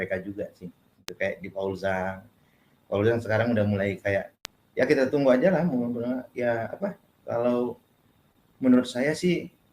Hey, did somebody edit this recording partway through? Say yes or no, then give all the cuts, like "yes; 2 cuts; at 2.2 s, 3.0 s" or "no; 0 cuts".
yes; 2 cuts; at 1.0 s, 4.4 s